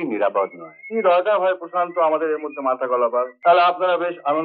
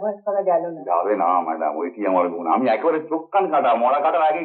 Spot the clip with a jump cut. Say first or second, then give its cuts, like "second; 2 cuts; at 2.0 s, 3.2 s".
first; 1 cut; at 3.3 s